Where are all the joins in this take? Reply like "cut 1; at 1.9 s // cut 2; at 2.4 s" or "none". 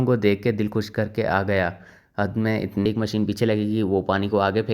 cut 1; at 2.9 s